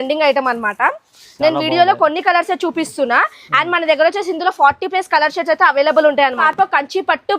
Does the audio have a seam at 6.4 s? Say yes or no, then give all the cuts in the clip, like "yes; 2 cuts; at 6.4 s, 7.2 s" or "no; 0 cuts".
yes; 1 cut; at 6.4 s